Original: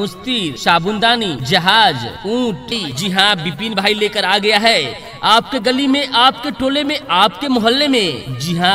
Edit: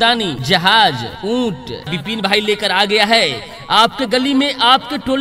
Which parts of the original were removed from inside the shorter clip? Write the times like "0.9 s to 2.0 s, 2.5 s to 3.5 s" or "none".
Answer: 2.9 s to 3.4 s